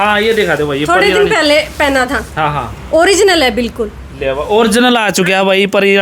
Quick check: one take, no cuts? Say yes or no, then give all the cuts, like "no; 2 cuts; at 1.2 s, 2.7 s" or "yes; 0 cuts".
yes; 0 cuts